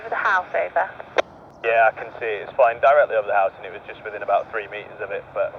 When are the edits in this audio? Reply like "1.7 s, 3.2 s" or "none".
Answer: 1.4 s